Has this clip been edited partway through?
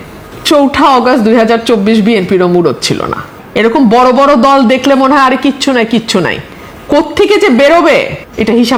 no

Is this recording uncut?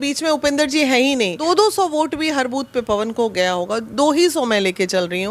no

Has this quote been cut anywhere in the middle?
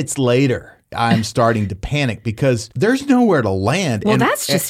yes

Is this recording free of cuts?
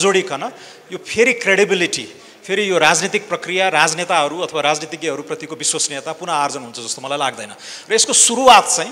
yes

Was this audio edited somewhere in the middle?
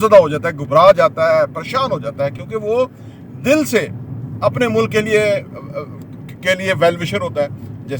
no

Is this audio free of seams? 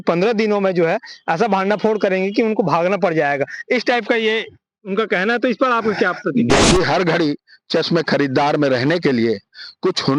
no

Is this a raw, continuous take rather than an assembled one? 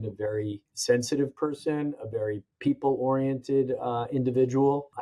no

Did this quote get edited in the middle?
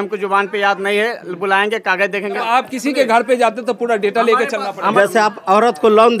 yes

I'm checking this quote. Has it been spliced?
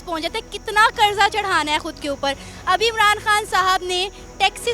no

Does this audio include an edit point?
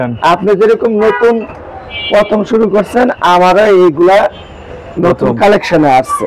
no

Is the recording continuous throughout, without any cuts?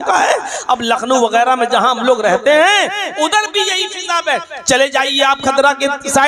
yes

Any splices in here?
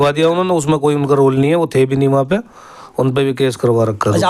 no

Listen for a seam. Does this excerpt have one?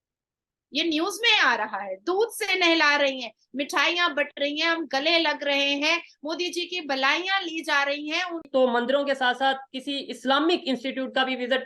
yes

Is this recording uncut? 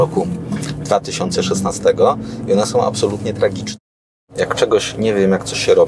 no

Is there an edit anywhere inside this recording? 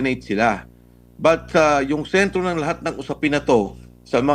no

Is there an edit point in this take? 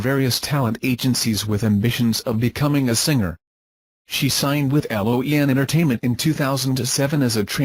no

